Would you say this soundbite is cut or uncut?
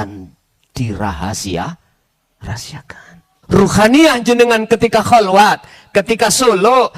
cut